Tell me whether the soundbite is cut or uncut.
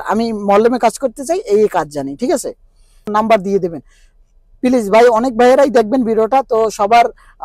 cut